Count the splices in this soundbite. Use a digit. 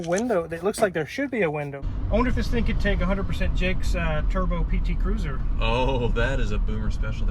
1